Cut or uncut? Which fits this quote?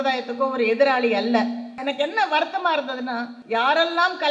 cut